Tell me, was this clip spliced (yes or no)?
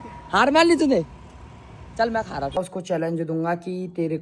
yes